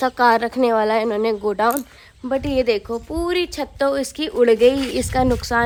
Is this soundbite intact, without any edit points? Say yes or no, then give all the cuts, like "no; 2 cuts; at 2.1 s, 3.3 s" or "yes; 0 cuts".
yes; 0 cuts